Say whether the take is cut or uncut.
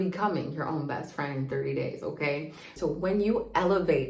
cut